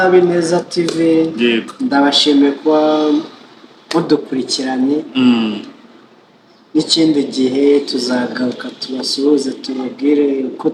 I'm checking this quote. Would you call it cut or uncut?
uncut